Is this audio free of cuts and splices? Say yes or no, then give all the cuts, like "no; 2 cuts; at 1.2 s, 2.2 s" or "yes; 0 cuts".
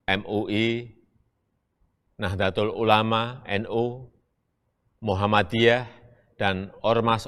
yes; 0 cuts